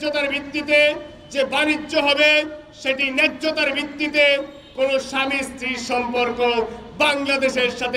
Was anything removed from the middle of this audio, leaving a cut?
no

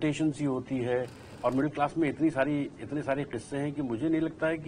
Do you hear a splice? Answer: yes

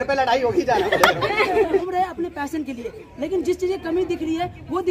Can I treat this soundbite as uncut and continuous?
no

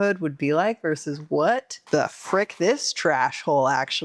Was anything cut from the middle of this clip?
yes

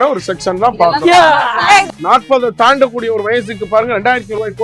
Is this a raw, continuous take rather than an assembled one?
no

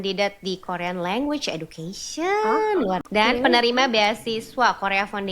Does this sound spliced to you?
yes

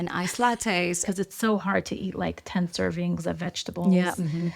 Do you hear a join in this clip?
yes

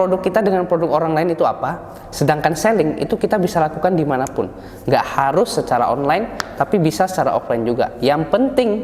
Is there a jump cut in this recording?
no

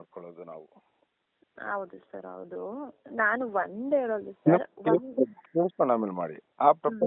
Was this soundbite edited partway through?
no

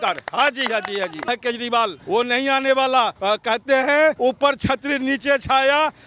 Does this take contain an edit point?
yes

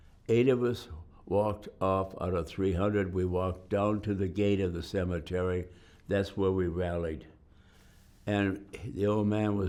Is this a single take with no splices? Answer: yes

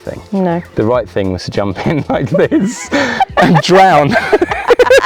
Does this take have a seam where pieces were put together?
no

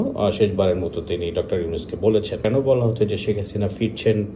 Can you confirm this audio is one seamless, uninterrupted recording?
no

